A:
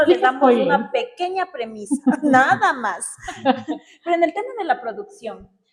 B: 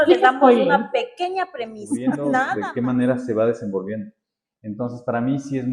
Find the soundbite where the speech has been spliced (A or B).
B